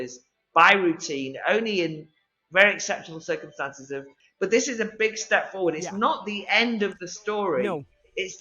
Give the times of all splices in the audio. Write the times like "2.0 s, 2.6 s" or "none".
4.2 s

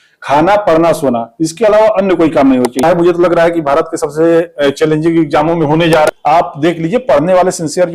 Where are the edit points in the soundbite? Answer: 2.8 s, 6.1 s

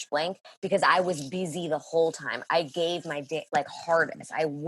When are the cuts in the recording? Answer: none

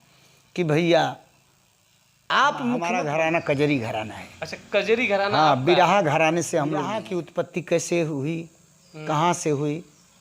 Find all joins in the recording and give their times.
2.9 s, 7.2 s

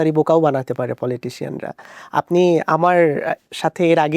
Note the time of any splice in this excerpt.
none

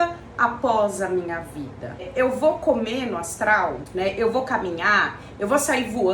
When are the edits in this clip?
2.1 s, 3.8 s

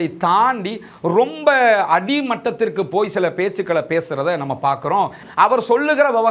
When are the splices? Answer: 5.2 s

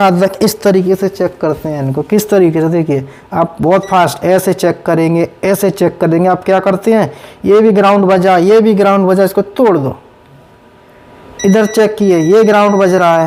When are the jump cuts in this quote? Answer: none

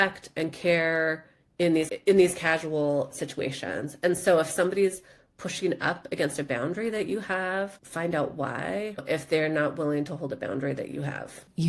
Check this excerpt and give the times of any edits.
9.0 s

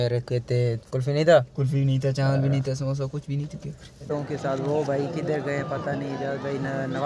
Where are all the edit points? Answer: 4.1 s

